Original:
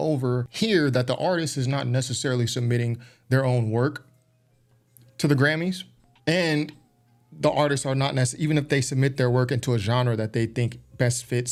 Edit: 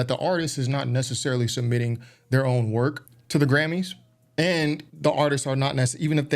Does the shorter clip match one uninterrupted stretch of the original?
no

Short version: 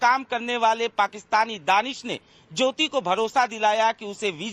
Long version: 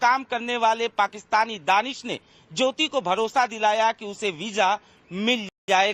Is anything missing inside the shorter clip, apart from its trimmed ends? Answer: no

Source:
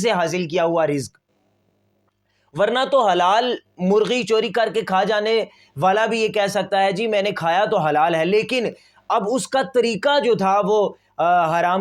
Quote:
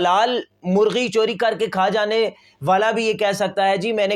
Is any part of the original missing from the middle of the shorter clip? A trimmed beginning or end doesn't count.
no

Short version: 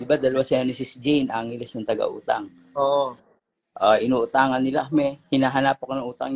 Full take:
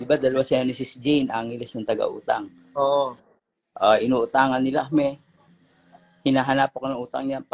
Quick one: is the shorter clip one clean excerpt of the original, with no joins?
no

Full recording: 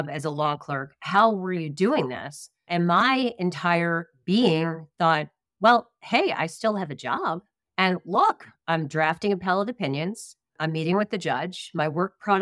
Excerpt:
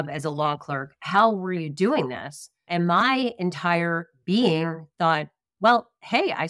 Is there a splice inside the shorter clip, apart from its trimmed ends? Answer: no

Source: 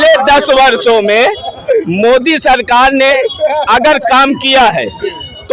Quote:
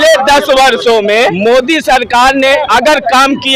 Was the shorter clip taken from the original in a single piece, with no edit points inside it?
no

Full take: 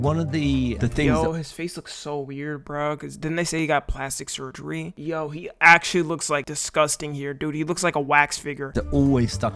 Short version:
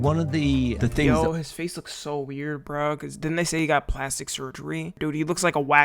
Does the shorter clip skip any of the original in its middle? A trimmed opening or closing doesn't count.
yes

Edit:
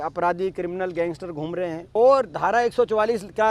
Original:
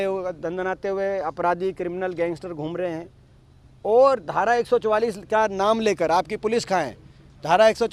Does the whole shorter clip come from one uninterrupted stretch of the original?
no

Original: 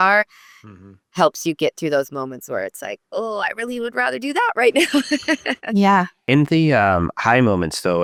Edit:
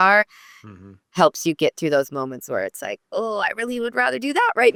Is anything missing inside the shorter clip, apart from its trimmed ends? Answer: no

